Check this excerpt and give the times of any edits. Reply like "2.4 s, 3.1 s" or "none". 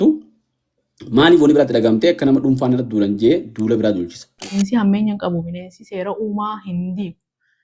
4.6 s